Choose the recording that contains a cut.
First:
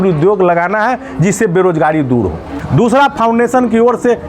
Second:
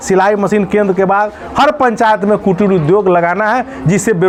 first; 1 cut; at 2.5 s

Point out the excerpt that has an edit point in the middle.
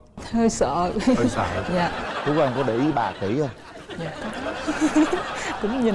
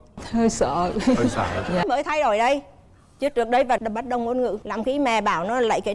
second; 1 cut; at 1.8 s

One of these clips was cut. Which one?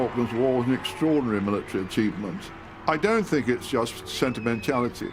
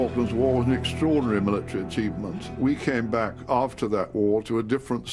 second; 1 cut; at 2.5 s

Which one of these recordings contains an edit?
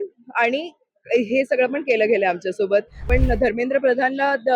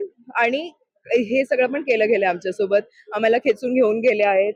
first; 1 cut; at 3.1 s

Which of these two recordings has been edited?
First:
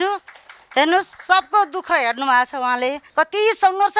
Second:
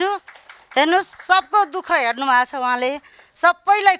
first; 1 cut; at 3.0 s

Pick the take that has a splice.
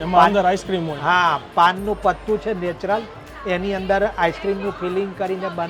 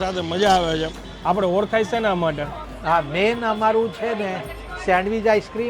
second; 2 cuts; at 1.1 s, 2.7 s

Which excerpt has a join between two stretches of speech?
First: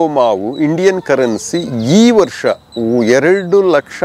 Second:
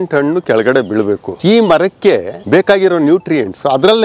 second; 2 cuts; at 1.3 s, 2.3 s

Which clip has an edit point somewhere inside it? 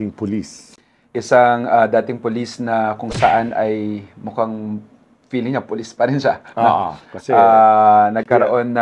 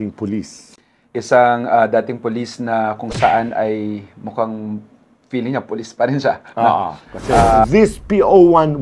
second; 1 cut; at 7.6 s

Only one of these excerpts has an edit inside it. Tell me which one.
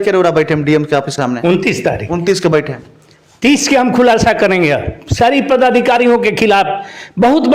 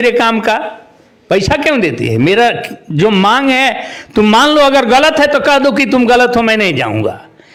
first; 1 cut; at 1.1 s

